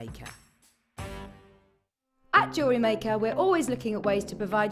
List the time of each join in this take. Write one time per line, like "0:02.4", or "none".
0:01.7